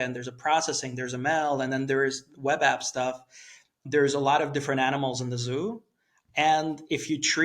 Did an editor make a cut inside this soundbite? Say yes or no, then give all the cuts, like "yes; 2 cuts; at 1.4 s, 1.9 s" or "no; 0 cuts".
yes; 1 cut; at 3.8 s